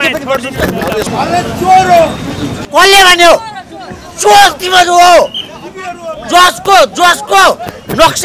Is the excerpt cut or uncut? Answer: cut